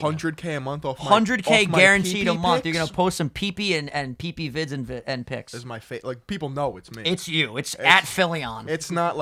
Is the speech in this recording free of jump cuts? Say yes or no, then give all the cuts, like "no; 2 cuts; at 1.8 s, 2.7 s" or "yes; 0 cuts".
yes; 0 cuts